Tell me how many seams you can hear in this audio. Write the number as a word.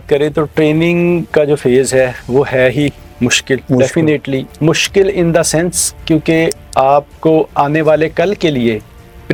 zero